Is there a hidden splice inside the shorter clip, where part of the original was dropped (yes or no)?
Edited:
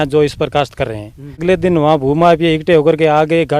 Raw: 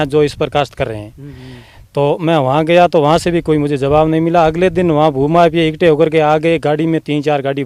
yes